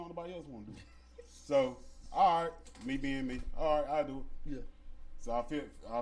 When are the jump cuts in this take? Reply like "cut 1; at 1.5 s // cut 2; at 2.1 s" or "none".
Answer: none